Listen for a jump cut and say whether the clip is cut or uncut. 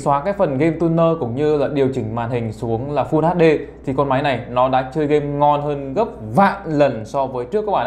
uncut